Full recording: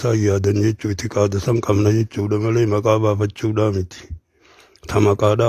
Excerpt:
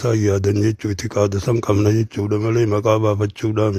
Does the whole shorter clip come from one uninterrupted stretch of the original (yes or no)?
yes